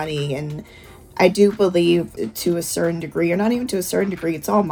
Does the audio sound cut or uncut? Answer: uncut